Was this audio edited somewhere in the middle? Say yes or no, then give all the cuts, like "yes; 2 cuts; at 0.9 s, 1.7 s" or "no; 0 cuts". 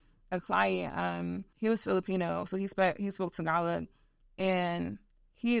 yes; 1 cut; at 1.5 s